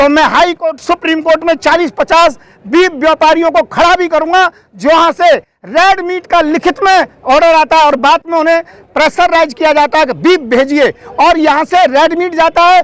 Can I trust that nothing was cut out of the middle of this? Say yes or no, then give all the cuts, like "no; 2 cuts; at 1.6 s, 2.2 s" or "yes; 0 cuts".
yes; 0 cuts